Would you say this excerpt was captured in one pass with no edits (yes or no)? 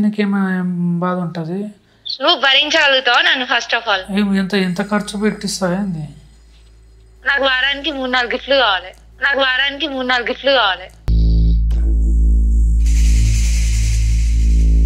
yes